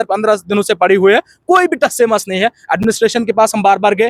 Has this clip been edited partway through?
no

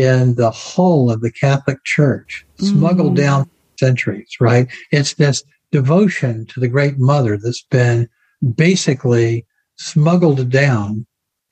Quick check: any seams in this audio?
no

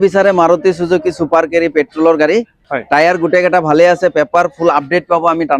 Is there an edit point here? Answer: yes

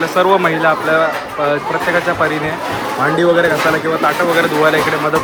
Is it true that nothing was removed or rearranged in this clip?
yes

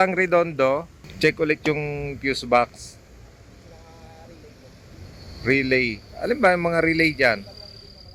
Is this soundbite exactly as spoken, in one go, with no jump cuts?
yes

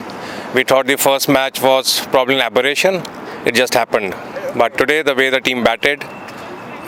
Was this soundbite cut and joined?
no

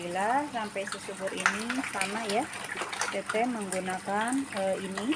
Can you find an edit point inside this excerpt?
no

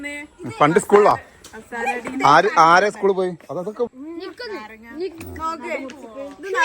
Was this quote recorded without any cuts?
no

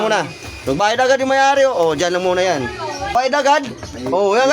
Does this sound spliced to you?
yes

